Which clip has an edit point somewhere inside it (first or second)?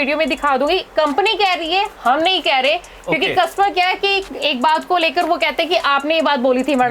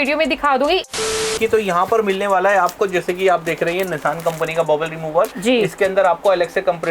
second